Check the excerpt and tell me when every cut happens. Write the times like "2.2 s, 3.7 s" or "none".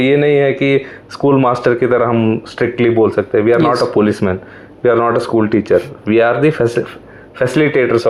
none

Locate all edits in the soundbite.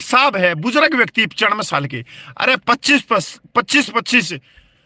none

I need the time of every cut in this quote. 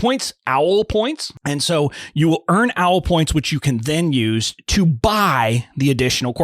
1.3 s

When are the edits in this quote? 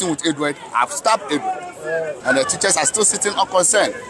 2.2 s

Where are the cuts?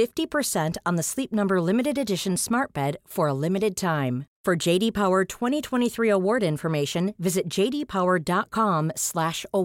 none

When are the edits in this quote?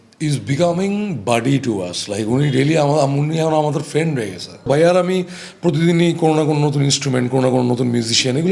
4.7 s

